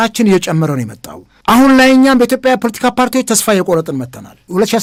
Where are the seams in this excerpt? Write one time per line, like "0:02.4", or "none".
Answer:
none